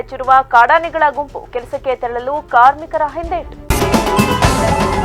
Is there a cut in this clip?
yes; 1 cut; at 3.6 s

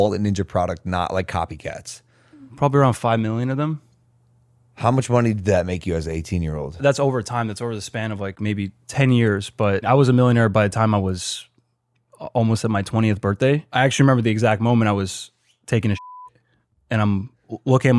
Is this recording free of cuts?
no; 3 cuts; at 6.8 s, 9.8 s, 13.7 s

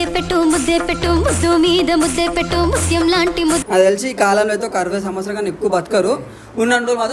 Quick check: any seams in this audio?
yes; 1 cut; at 3.6 s

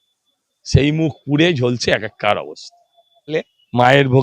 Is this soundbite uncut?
no; 1 cut; at 3.3 s

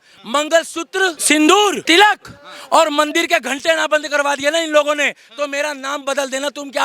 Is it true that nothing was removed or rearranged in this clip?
no; 2 cuts; at 1.2 s, 1.8 s

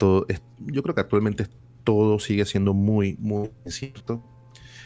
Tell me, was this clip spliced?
no; 0 cuts

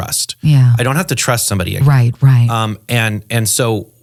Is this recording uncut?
yes; 0 cuts

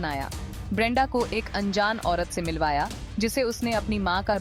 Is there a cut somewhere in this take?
no; 0 cuts

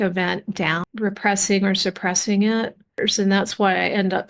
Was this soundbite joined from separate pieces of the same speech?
yes; 1 cut; at 3.1 s

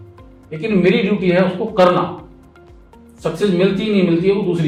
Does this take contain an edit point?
no; 0 cuts

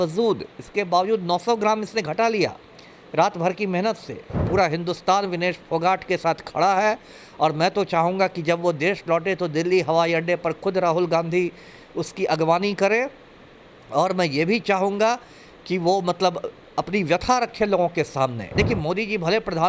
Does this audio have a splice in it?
yes; 2 cuts; at 4.4 s, 18.5 s

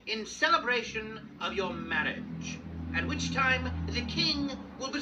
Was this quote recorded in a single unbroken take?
no; 1 cut; at 2.5 s

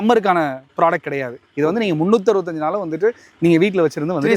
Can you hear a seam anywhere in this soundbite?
no; 0 cuts

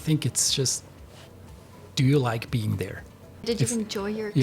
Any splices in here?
yes; 1 cut; at 3.4 s

